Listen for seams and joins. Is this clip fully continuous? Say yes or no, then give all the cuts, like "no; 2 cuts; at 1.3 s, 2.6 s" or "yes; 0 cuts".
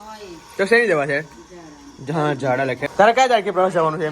no; 1 cut; at 2.9 s